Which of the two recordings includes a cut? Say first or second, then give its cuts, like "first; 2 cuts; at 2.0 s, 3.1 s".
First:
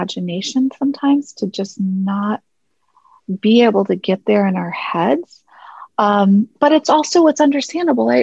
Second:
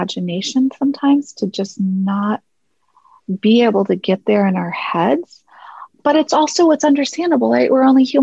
second; 1 cut; at 5.9 s